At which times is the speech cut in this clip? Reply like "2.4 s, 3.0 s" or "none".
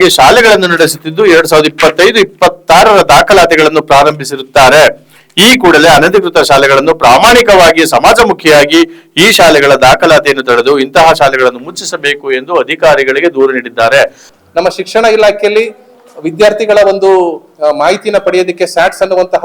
14.2 s